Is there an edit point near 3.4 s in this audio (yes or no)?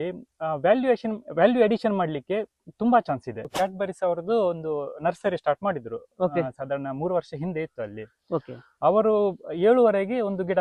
yes